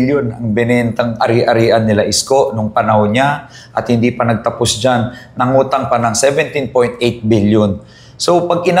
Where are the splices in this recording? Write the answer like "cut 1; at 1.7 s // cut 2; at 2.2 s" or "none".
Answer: none